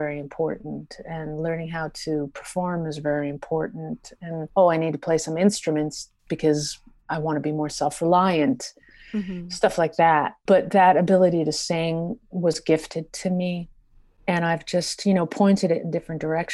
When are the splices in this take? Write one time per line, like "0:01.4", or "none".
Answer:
0:04.5
0:10.3